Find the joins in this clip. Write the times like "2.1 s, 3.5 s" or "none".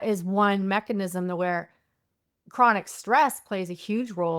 none